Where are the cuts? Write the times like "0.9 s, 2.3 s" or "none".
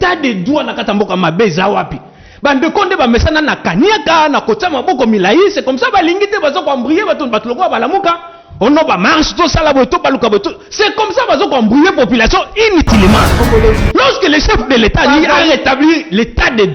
13.4 s